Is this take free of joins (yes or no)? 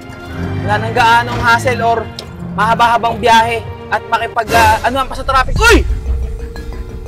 no